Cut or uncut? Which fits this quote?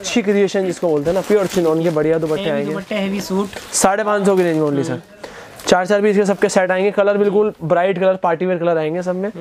uncut